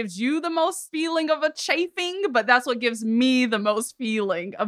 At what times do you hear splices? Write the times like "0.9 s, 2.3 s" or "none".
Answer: none